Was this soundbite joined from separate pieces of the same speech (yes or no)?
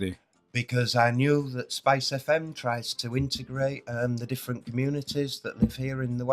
yes